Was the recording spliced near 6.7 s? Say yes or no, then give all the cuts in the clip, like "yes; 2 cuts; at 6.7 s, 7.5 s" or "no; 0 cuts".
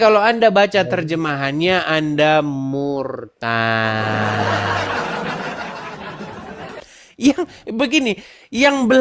yes; 1 cut; at 6.7 s